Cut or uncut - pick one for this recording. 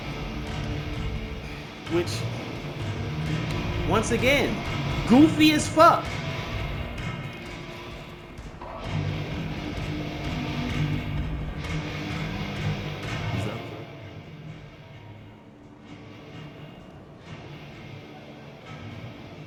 uncut